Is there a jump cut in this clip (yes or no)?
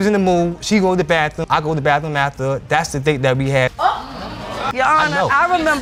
no